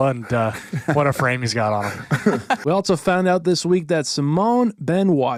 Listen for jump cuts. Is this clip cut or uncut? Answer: uncut